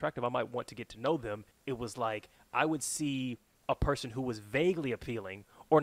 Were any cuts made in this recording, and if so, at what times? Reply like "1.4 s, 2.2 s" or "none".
1.5 s, 3.5 s